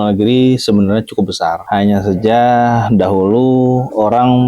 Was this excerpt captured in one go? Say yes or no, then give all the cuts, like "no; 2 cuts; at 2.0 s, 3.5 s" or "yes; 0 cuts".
yes; 0 cuts